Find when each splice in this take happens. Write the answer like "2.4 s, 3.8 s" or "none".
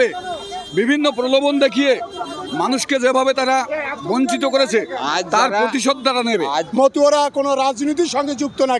6.7 s